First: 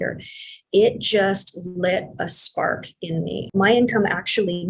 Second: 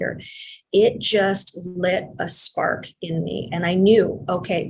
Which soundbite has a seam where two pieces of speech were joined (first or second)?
first